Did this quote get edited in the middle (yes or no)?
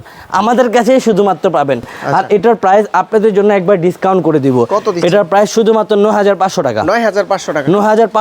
no